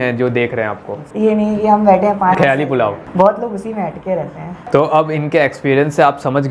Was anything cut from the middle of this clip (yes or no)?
yes